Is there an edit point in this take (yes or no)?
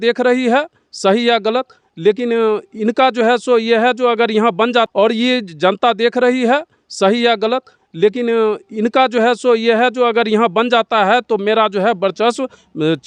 no